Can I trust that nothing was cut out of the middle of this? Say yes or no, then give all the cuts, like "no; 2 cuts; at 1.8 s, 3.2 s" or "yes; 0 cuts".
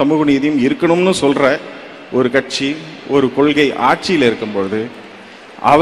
yes; 0 cuts